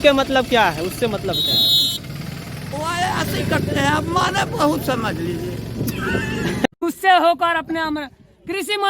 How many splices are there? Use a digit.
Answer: 1